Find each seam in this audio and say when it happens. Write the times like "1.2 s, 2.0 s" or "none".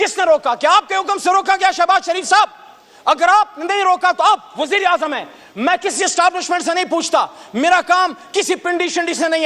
none